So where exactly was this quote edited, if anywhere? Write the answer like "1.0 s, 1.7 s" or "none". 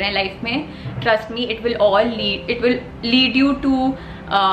none